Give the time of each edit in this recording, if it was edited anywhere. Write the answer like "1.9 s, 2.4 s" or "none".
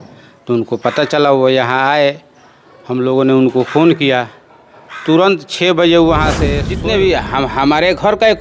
6.6 s